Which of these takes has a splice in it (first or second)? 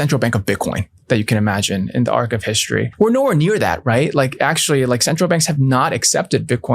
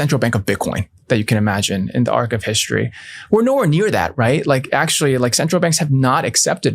first